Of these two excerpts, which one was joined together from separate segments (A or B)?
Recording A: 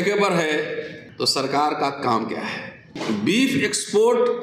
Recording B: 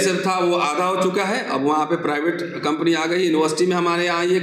A